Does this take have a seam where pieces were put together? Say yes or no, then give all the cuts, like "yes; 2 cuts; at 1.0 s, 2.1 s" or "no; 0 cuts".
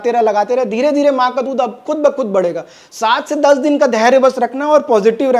no; 0 cuts